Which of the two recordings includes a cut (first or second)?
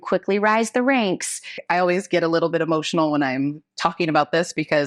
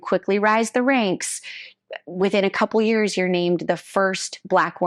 first